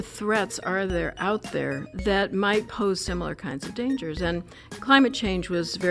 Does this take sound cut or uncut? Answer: cut